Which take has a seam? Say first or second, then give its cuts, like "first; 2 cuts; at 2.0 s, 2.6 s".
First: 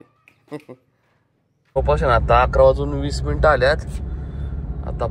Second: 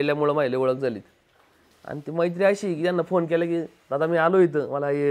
first; 1 cut; at 1.8 s